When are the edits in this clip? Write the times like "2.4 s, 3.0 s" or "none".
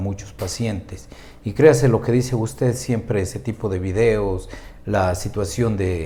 none